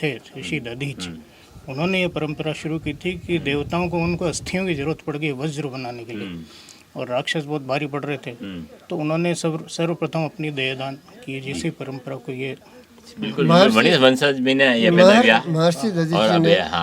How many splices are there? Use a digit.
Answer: 0